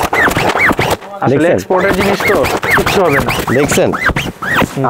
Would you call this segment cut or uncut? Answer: uncut